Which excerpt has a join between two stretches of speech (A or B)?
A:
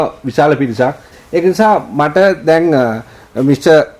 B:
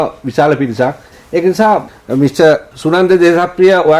B